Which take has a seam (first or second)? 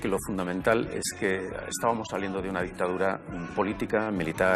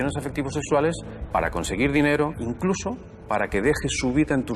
second